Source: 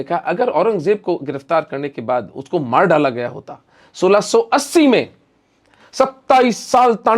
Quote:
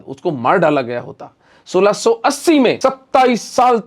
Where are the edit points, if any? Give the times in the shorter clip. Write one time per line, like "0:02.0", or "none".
0:02.8

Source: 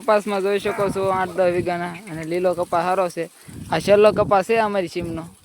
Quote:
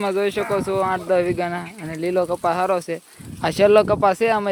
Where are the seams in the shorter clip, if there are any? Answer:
none

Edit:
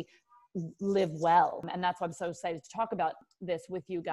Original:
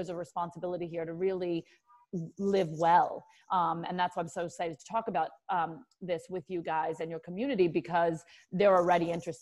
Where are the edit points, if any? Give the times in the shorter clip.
0:01.7
0:03.2

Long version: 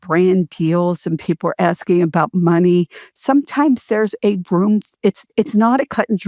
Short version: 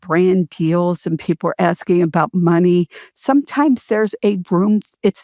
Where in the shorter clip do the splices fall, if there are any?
none

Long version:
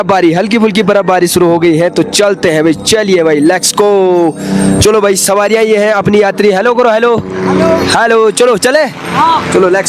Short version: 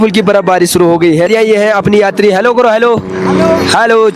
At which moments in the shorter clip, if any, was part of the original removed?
0:01.3

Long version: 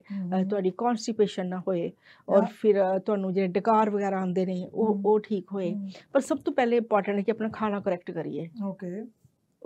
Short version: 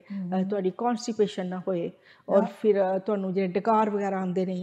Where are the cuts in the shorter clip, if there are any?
none

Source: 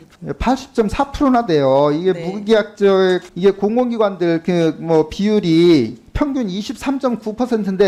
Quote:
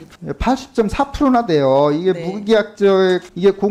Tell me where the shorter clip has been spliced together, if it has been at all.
none

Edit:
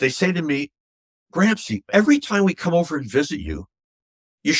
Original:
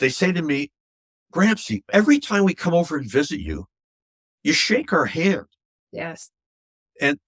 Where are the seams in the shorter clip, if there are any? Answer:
none

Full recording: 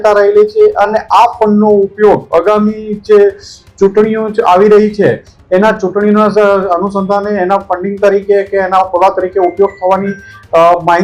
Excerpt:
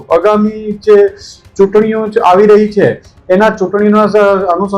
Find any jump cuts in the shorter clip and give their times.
none

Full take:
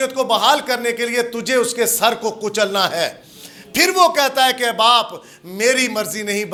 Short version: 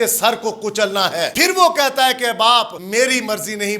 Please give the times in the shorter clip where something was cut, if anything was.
0:01.3
0:02.8

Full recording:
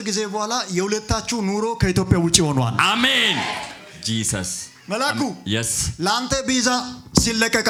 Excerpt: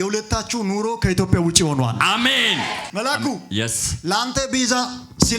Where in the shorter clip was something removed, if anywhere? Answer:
0:02.9

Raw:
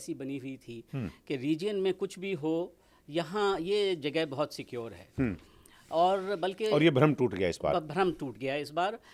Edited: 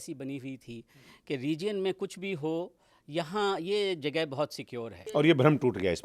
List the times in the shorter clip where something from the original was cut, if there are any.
0:05.1

